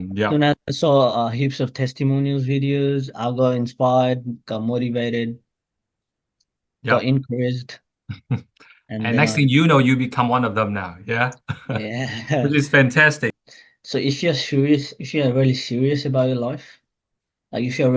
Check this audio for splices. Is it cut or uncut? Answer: cut